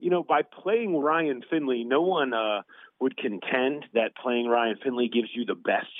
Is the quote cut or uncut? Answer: uncut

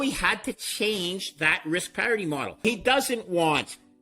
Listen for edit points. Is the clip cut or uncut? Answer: cut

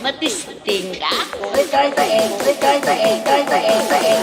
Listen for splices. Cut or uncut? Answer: uncut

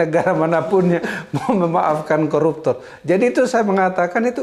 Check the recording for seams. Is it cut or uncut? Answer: uncut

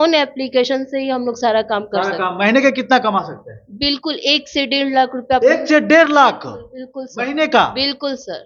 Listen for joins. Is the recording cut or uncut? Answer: uncut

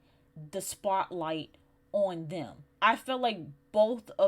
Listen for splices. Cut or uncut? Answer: cut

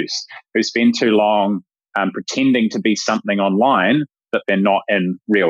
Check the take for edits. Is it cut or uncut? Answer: uncut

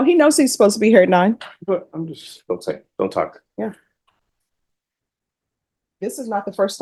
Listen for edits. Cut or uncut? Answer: uncut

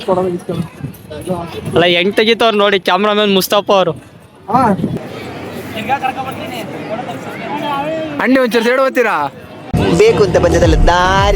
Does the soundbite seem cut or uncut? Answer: cut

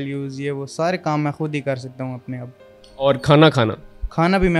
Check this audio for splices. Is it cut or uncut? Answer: uncut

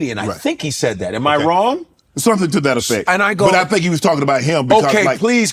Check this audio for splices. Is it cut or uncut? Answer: uncut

